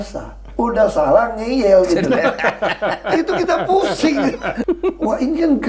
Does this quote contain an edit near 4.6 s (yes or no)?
yes